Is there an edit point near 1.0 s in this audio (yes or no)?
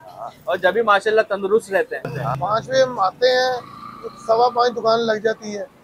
no